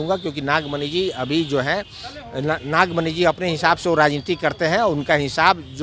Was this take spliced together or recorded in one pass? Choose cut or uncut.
uncut